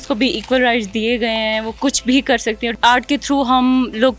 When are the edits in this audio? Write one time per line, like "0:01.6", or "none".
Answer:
0:02.7